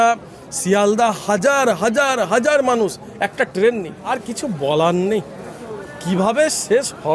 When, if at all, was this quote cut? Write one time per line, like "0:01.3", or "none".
0:04.1